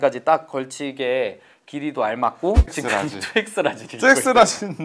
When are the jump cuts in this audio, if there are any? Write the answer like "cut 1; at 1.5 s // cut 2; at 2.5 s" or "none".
cut 1; at 2.7 s